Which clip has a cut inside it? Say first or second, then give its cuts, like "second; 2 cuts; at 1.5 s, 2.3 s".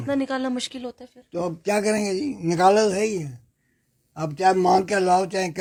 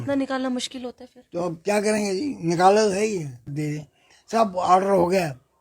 second; 1 cut; at 3.5 s